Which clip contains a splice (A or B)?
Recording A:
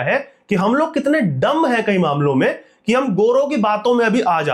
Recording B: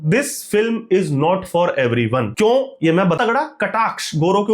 B